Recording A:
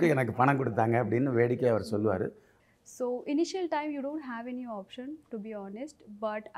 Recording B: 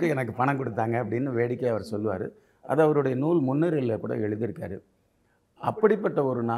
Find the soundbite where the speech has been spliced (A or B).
A